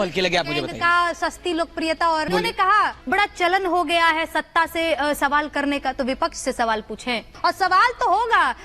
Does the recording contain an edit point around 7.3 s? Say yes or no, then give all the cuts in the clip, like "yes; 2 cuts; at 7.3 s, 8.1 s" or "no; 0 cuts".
yes; 2 cuts; at 2.3 s, 7.3 s